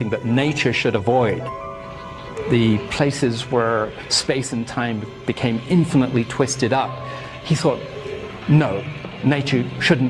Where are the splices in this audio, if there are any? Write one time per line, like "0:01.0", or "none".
none